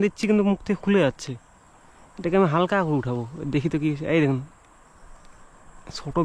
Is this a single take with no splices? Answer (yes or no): yes